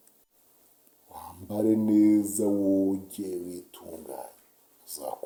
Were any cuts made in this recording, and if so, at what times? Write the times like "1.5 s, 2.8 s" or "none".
none